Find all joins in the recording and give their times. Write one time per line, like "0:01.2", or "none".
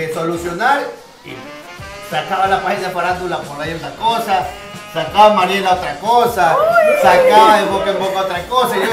none